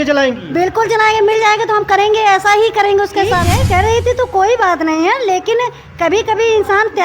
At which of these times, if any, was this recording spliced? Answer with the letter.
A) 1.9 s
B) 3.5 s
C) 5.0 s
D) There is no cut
B